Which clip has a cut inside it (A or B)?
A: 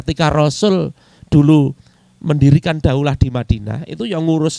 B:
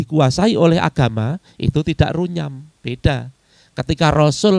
B